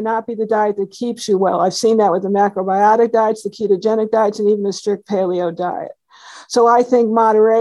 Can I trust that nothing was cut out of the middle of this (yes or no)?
yes